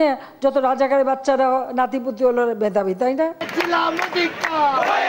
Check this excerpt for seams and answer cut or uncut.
cut